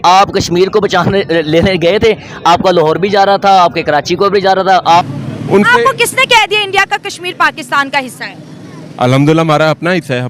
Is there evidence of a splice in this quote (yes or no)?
yes